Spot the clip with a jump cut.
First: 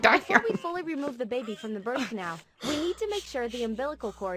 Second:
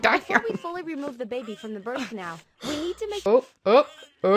second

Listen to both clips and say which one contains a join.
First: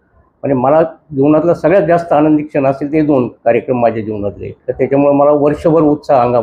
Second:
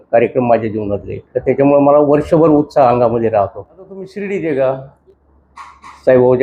second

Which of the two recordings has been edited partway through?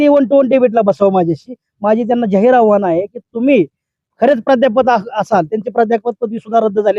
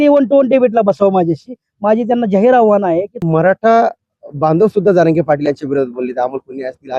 second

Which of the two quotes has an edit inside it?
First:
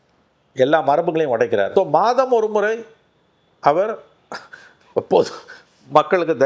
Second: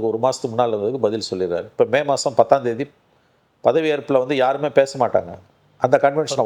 first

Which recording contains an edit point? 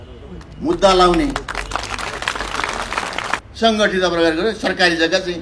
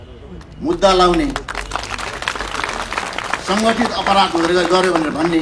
first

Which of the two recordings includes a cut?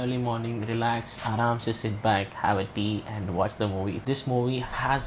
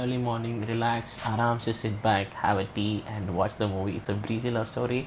first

